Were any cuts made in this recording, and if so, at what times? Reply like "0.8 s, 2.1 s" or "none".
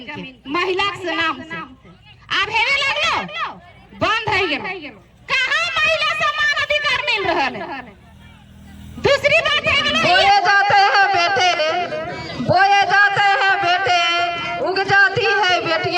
9.9 s